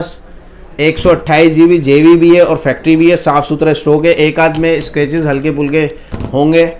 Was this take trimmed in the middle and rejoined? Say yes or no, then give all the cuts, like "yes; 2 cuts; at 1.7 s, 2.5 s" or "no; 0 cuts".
no; 0 cuts